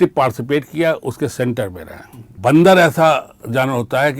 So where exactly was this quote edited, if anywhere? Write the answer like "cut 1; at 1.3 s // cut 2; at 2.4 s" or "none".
cut 1; at 2.3 s